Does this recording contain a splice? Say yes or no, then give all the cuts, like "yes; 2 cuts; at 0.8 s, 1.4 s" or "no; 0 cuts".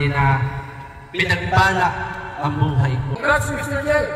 yes; 1 cut; at 3.1 s